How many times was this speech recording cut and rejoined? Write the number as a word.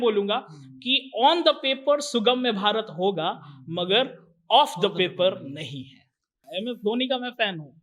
one